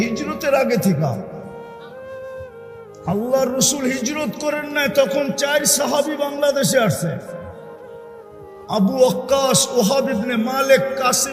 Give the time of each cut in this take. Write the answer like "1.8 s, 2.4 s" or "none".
none